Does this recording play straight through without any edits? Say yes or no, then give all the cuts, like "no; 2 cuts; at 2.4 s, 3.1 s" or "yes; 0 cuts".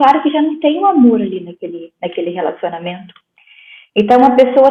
yes; 0 cuts